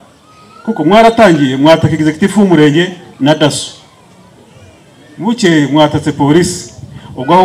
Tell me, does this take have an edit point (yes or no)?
no